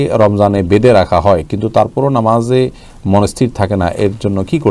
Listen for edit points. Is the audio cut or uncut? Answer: uncut